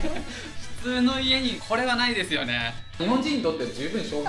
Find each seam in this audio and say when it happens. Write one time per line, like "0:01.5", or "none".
0:01.6
0:03.0